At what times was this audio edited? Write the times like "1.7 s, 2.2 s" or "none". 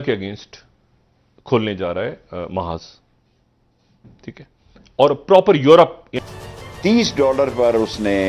6.1 s